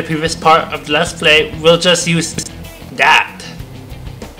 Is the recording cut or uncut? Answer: uncut